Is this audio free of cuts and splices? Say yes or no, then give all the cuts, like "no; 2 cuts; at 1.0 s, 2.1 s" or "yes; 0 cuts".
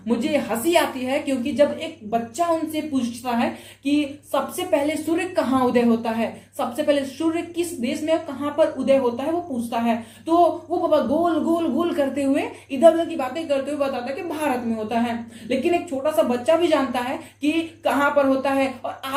yes; 0 cuts